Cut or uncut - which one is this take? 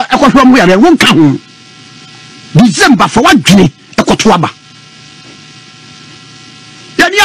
uncut